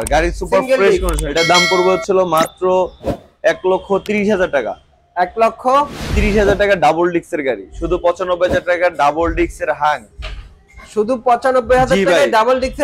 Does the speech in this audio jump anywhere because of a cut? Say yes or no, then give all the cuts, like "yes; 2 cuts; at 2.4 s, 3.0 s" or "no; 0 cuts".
yes; 2 cuts; at 1.3 s, 7.7 s